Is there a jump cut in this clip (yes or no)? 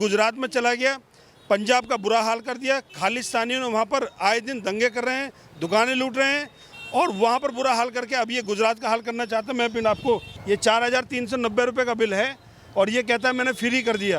yes